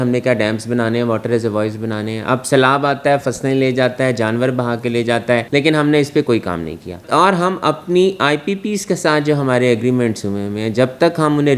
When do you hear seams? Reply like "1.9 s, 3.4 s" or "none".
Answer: none